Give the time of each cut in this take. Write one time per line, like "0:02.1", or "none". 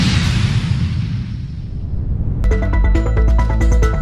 none